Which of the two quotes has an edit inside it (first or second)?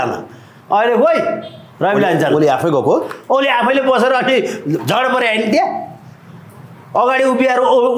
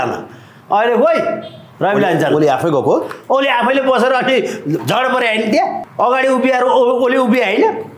second